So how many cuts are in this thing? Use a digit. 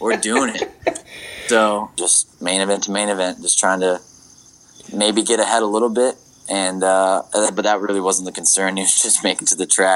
1